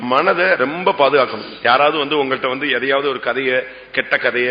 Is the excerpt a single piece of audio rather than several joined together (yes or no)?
yes